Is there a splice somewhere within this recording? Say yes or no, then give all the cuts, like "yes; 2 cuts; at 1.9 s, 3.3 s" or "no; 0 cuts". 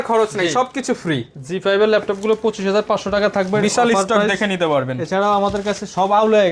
no; 0 cuts